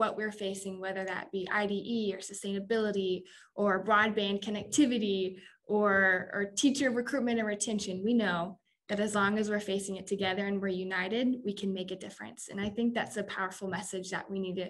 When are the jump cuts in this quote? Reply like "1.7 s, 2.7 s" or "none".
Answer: none